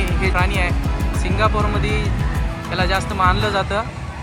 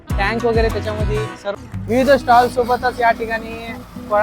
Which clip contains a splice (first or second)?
second